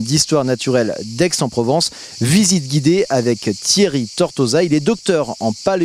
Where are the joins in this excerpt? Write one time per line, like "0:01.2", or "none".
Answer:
0:04.6